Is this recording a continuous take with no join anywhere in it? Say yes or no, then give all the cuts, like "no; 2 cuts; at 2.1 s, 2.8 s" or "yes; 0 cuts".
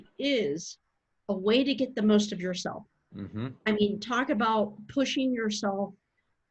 yes; 0 cuts